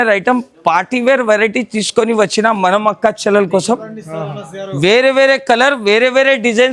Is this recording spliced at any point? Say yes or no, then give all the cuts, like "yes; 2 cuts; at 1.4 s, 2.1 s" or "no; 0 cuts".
no; 0 cuts